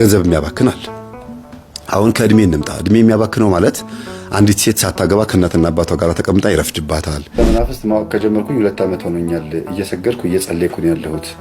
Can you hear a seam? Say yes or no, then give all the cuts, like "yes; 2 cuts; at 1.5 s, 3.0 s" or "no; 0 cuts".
yes; 1 cut; at 7.4 s